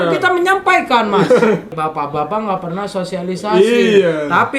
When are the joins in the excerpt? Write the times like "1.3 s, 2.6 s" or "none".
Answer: 1.8 s